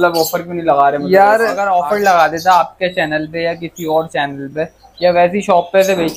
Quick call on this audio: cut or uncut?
cut